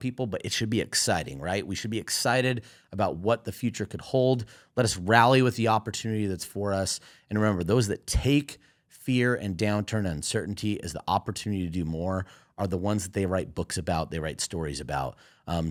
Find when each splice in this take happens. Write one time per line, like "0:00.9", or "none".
none